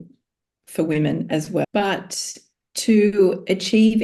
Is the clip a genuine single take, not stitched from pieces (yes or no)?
no